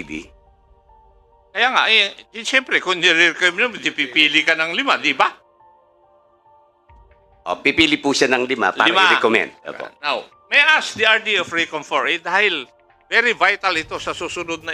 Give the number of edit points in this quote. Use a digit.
0